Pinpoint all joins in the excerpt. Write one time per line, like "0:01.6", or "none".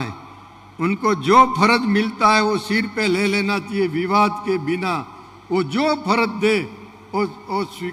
none

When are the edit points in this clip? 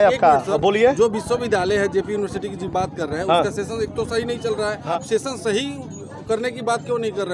0:04.9

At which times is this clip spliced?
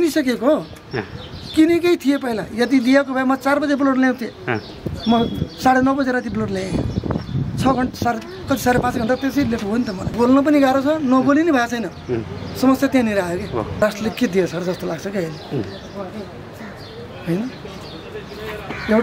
0:10.1
0:13.8

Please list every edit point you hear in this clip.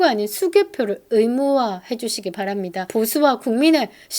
0:02.8

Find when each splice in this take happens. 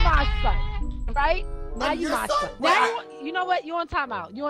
0:02.5

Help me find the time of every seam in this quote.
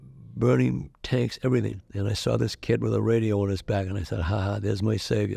0:01.8

